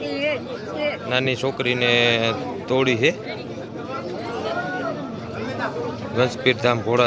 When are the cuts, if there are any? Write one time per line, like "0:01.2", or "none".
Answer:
none